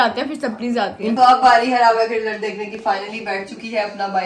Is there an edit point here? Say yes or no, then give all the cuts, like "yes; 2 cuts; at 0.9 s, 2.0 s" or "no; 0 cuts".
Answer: yes; 1 cut; at 1.2 s